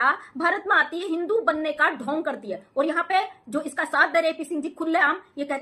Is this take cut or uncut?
uncut